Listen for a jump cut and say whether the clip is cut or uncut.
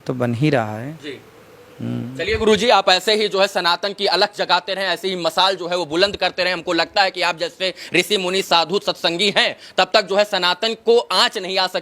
uncut